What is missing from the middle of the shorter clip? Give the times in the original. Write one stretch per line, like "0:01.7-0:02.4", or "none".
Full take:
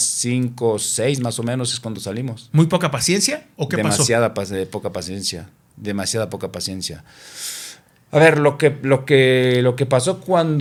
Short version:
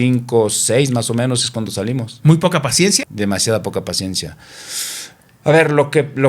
0:03.3-0:05.7